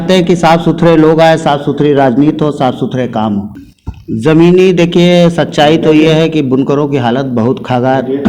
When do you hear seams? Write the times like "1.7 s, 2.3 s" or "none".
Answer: 3.5 s